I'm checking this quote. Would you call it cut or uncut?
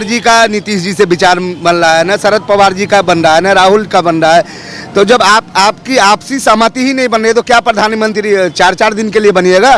uncut